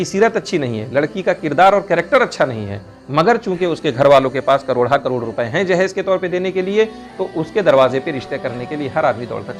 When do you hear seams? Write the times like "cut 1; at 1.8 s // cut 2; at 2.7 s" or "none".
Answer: none

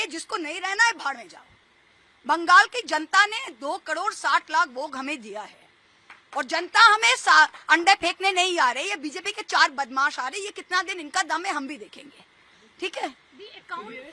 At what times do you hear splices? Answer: none

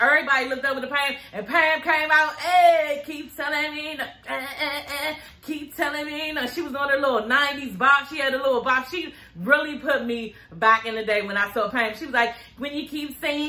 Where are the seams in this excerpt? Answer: none

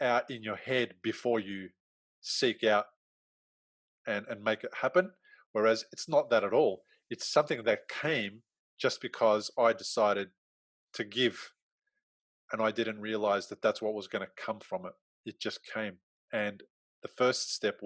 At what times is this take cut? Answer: none

